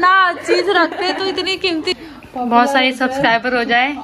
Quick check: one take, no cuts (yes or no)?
no